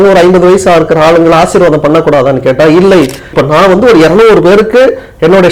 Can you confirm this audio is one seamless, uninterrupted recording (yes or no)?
no